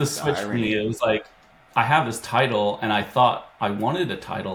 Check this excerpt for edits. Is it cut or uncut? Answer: uncut